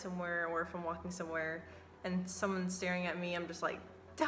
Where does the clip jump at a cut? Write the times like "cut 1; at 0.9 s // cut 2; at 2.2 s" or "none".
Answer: none